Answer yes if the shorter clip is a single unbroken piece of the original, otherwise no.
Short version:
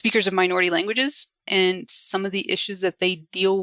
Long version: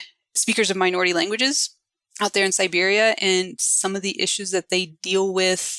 no